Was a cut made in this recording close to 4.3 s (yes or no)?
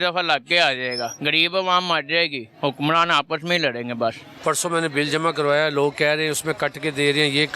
yes